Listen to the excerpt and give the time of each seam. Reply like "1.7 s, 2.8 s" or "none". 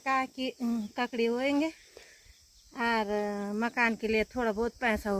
none